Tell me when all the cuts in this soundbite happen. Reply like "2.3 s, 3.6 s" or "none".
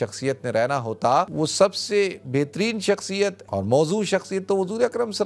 1.3 s, 3.4 s